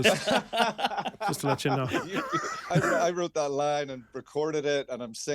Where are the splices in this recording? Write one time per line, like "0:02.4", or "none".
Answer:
0:02.6